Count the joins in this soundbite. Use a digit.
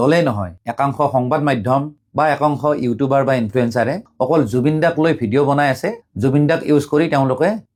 0